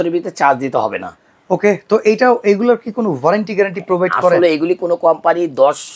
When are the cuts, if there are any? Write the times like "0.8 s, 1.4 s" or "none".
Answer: none